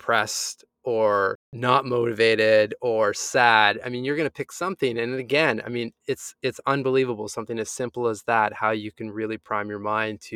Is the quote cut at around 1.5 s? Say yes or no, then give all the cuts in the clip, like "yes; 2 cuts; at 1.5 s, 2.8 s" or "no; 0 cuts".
yes; 1 cut; at 1.5 s